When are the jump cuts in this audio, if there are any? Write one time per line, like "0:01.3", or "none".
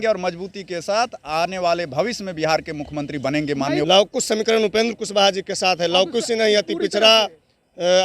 0:03.8